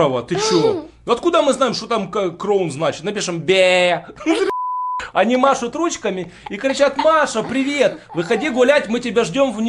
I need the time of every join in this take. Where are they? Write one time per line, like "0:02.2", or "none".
0:04.5